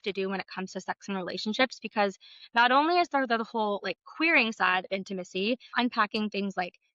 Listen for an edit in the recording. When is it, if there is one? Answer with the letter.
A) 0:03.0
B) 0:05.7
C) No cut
B